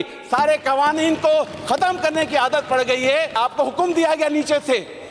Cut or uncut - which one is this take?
cut